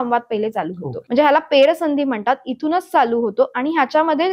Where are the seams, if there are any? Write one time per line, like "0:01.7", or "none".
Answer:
0:00.9